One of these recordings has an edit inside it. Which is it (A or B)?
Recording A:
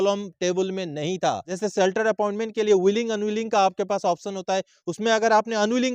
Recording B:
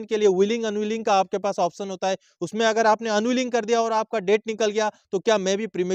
A